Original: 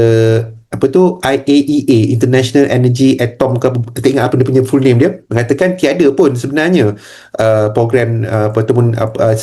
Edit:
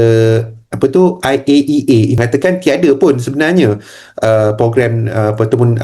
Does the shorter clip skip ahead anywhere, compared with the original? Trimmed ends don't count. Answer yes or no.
yes